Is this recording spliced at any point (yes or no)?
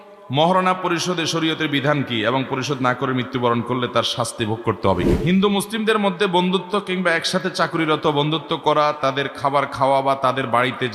yes